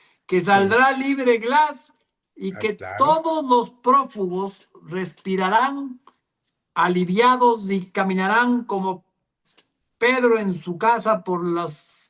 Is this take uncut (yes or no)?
yes